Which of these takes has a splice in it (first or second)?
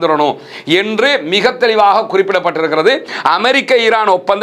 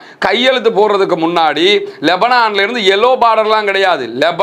first